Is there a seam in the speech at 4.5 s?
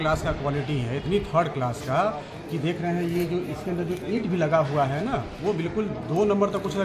no; 0 cuts

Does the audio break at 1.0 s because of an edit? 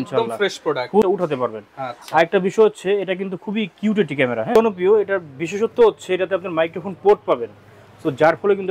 yes; 2 cuts; at 1.0 s, 4.5 s

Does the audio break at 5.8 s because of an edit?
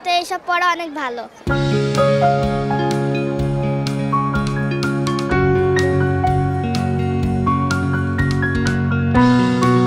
no; 1 cut; at 1.4 s

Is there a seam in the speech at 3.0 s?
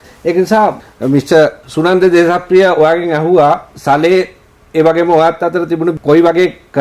no; 2 cuts; at 0.8 s, 1.6 s

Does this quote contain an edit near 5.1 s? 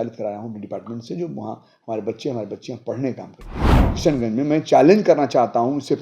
no; 1 cut; at 3.8 s

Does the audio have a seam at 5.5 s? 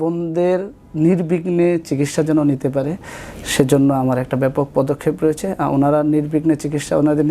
no; 0 cuts

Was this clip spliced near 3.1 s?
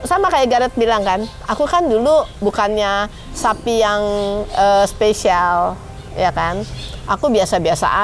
no; 0 cuts

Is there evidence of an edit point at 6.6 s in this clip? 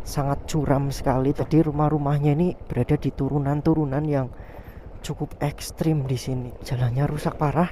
yes; 2 cuts; at 1.4 s, 6.6 s

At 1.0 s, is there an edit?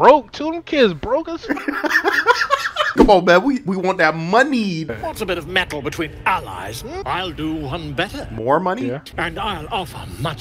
no; 4 cuts; at 2.9 s, 5.1 s, 7.0 s, 9.1 s

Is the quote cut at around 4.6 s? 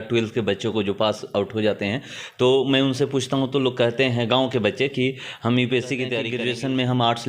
no; 1 cut; at 6.3 s

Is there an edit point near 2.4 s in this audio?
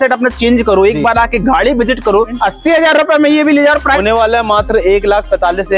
yes; 2 cuts; at 2.4 s, 4.0 s

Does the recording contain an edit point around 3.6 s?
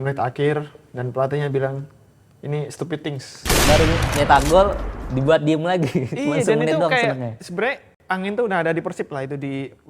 yes; 1 cut; at 3.6 s

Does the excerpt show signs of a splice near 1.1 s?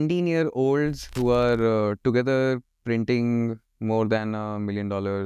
yes; 1 cut; at 1.1 s

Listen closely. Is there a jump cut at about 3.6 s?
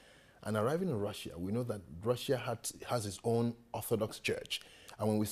yes; 1 cut; at 3.6 s

